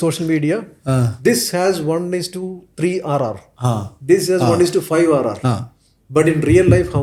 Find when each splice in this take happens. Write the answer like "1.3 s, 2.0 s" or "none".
none